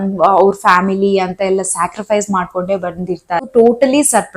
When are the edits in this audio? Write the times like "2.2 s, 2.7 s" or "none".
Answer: 3.5 s